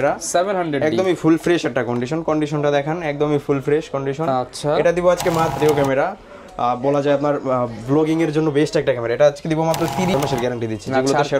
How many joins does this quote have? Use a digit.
2